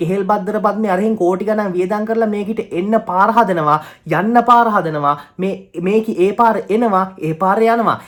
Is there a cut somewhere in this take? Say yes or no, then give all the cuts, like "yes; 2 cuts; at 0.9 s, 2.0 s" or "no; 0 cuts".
no; 0 cuts